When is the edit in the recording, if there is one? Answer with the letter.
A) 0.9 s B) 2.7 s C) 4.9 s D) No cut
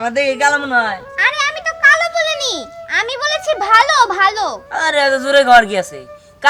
D